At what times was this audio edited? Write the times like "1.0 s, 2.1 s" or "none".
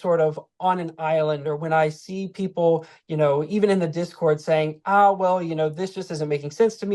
none